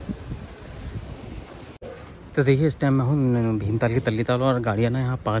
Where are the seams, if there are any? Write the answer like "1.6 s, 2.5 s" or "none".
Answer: none